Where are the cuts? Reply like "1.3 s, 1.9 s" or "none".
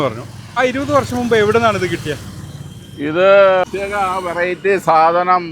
3.6 s